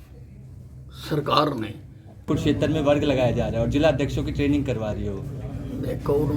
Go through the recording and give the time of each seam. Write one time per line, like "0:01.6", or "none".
0:02.3